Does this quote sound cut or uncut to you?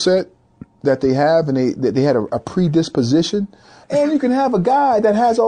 cut